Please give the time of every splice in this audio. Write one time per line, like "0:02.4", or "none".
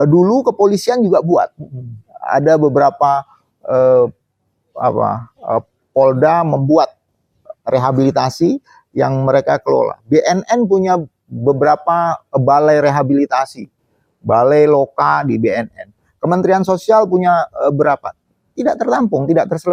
none